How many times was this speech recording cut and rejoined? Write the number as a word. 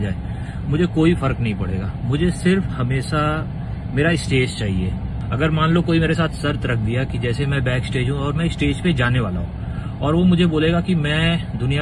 one